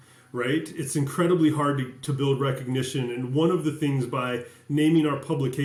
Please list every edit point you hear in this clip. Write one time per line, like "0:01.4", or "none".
none